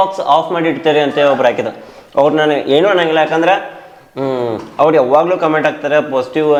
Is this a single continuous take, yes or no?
yes